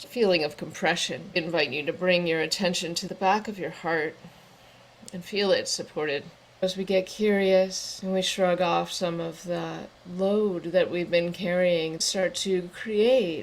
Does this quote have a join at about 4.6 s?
no; 5 cuts; at 1.4 s, 3.0 s, 6.4 s, 7.9 s, 12.0 s

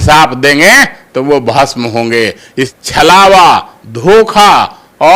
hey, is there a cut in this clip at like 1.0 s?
no; 1 cut; at 2.7 s

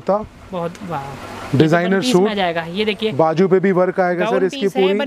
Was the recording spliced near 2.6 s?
no; 0 cuts

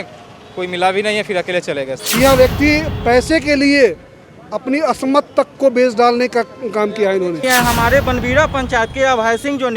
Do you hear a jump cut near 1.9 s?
yes; 2 cuts; at 1.9 s, 7.4 s

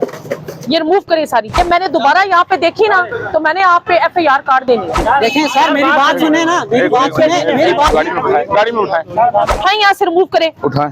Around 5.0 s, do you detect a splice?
yes; 4 cuts; at 1.6 s, 5.0 s, 7.9 s, 9.5 s

